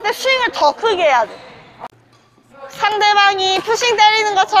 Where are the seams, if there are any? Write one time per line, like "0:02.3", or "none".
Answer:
0:01.7